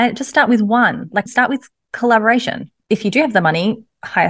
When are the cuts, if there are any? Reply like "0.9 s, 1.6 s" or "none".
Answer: 2.8 s